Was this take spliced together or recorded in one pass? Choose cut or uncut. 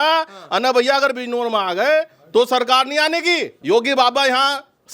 cut